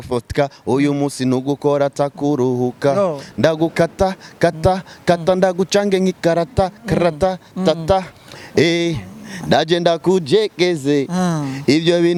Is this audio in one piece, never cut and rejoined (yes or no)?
yes